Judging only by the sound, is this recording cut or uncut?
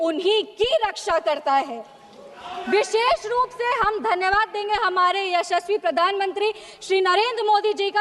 uncut